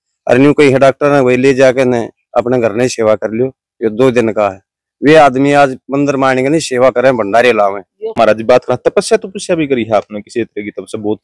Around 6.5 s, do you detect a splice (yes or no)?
no